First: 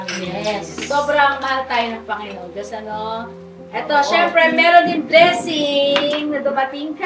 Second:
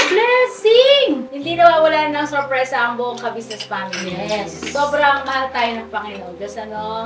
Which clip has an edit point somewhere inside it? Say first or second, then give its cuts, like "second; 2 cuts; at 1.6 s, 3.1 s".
second; 1 cut; at 1.4 s